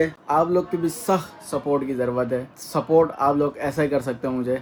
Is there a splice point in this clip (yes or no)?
no